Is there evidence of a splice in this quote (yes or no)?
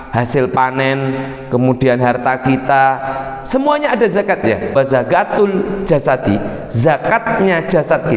yes